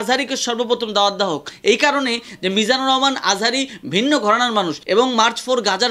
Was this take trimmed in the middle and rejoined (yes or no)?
no